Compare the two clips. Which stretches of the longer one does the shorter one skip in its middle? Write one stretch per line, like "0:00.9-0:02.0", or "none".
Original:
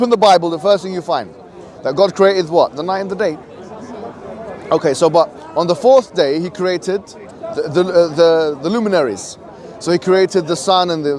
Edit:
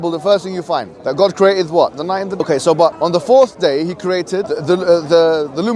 0:01.4-0:01.8
0:03.2-0:04.8
0:05.3-0:05.5
0:07.1-0:07.6